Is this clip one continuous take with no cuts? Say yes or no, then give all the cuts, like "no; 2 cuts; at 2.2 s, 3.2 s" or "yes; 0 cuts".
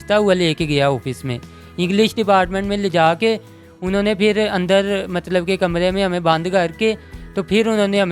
yes; 0 cuts